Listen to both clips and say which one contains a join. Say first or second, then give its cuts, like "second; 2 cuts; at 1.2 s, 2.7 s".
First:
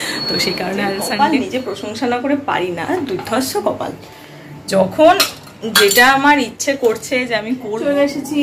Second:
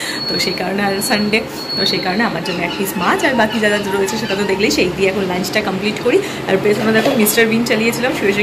first; 2 cuts; at 1.1 s, 7.6 s